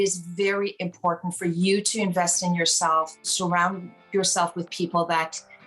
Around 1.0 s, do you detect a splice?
no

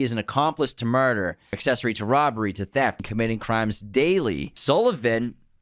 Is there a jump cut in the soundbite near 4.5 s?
yes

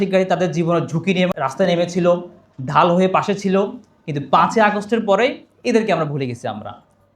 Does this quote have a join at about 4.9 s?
no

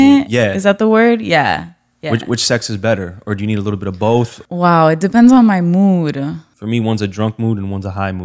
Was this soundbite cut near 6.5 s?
yes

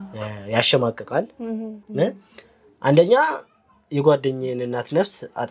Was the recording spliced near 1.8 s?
yes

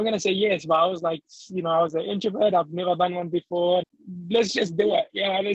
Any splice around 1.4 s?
no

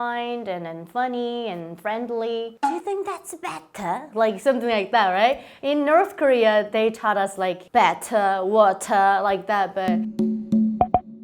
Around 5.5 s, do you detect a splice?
no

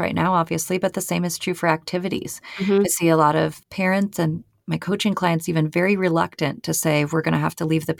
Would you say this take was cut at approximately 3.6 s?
yes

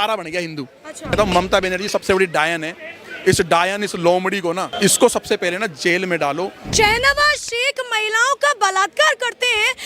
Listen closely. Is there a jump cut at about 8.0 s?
no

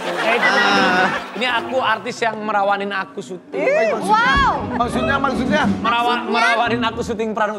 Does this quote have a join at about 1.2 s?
yes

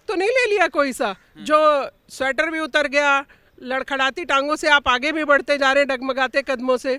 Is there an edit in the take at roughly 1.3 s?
no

